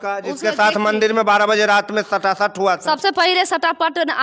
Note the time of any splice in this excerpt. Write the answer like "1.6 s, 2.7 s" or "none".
none